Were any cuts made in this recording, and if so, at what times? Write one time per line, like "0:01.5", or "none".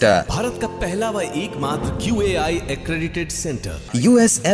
none